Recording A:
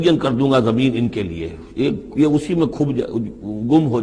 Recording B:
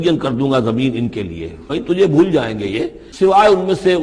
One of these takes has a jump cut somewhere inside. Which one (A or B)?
B